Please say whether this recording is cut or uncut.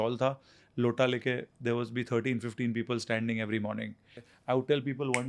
cut